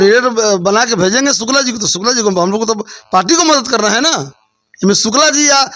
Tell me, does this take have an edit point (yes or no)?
no